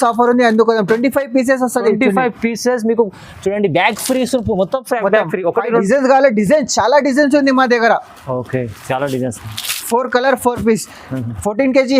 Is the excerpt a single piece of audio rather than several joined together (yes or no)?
no